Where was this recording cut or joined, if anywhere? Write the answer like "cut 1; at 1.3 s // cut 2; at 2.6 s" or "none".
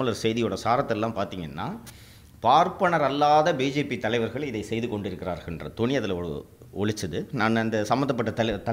none